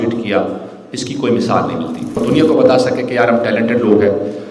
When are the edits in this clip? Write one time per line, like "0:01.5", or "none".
0:02.2